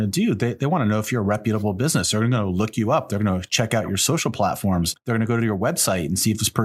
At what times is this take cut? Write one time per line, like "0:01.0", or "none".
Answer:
0:04.9